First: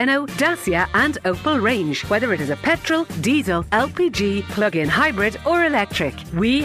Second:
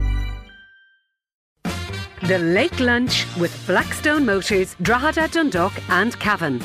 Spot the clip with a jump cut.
second; 1 cut; at 1.5 s

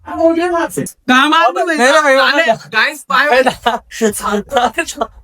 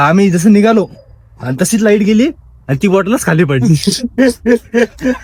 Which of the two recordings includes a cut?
first; 1 cut; at 1.0 s

